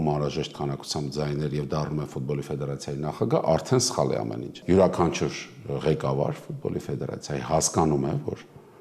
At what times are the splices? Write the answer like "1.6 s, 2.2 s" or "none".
4.5 s